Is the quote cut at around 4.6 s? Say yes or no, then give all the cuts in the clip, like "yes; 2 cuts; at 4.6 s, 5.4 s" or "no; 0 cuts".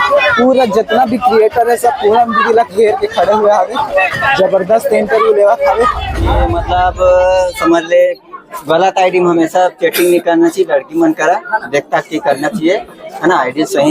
no; 1 cut; at 6.4 s